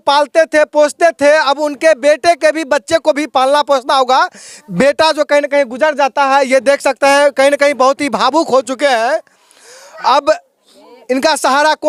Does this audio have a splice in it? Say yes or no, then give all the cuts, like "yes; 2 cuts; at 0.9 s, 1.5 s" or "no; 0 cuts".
no; 0 cuts